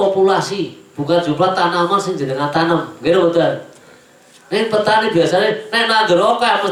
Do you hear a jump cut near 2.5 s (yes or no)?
no